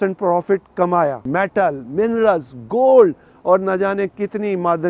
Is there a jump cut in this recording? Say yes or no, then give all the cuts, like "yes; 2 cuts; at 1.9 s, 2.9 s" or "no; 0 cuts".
yes; 1 cut; at 1.2 s